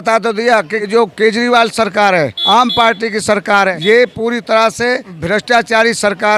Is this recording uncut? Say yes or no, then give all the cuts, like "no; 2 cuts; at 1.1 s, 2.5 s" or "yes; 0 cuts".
no; 4 cuts; at 0.9 s, 2.4 s, 3.8 s, 5.1 s